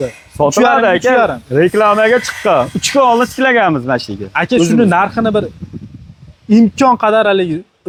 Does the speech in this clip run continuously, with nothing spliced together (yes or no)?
yes